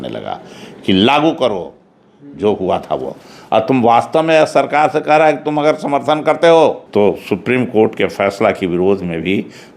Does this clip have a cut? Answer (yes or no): yes